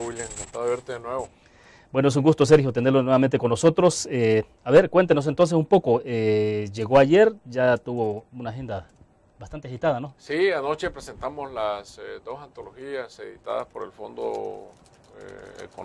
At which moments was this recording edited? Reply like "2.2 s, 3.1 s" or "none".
7.1 s